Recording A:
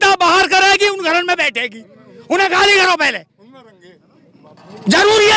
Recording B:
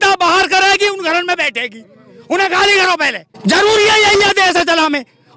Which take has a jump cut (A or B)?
B